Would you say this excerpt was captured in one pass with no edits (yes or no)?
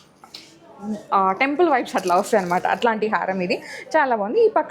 yes